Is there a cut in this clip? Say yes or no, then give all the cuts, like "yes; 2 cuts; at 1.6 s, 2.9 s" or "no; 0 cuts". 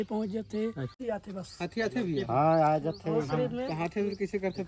yes; 1 cut; at 0.9 s